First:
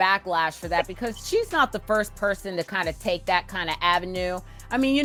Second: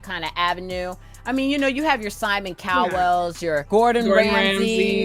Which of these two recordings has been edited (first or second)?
second